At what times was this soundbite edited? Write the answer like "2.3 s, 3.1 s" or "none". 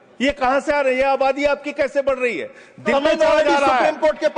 2.9 s